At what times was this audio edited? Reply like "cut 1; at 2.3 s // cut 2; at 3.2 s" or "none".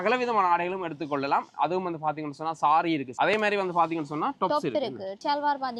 none